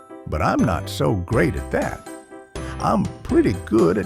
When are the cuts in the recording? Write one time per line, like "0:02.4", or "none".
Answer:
none